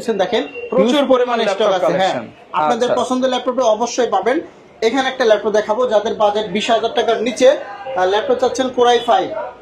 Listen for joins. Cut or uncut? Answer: uncut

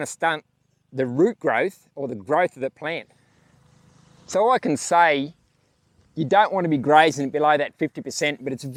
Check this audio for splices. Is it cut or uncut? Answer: uncut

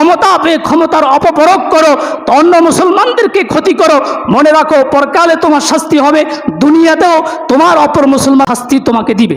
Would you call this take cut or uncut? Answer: cut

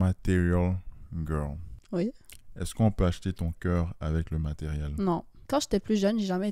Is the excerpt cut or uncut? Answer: cut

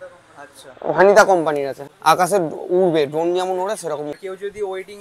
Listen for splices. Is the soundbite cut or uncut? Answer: cut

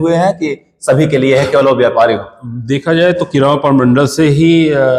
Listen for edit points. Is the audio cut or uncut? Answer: uncut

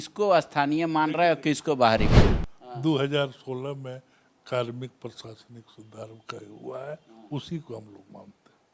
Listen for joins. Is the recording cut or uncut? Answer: cut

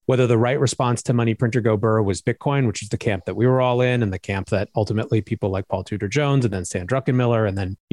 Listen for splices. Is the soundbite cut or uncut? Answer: uncut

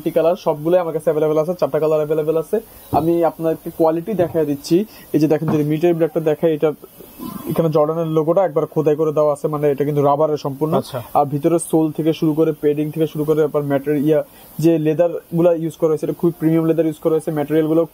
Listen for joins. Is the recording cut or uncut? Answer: uncut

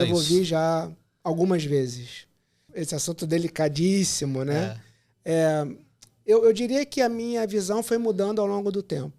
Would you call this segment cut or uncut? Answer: cut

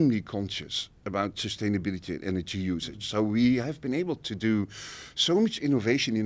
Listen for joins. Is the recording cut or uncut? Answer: uncut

